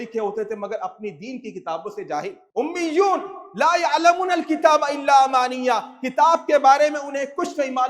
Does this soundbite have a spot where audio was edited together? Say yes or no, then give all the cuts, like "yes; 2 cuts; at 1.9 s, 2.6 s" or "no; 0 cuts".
yes; 1 cut; at 2.4 s